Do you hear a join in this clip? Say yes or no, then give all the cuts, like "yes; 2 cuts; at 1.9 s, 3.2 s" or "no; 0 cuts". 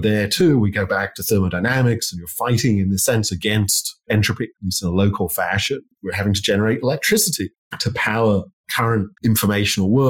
yes; 2 cuts; at 5.9 s, 8.8 s